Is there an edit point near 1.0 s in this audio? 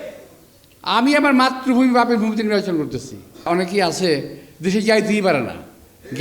no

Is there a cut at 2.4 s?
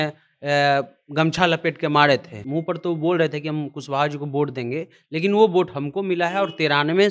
yes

